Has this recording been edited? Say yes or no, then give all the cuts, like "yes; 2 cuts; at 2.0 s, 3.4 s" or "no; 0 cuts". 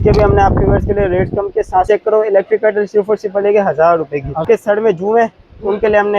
yes; 2 cuts; at 1.9 s, 4.4 s